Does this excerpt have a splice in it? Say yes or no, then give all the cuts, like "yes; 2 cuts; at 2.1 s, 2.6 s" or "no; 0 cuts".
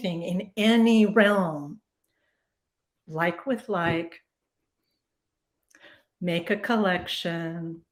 no; 0 cuts